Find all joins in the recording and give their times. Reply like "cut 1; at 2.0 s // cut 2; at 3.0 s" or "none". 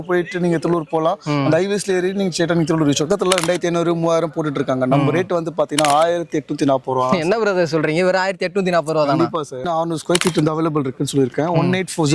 cut 1; at 3.1 s // cut 2; at 9.6 s